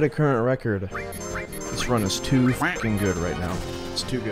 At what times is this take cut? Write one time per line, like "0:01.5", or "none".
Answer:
0:00.9